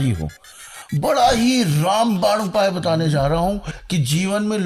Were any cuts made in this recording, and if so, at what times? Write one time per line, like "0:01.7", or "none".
0:03.7